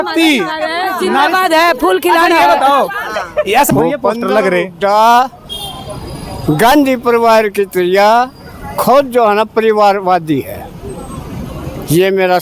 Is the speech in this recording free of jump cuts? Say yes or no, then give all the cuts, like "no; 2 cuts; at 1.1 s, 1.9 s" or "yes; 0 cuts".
no; 1 cut; at 3.7 s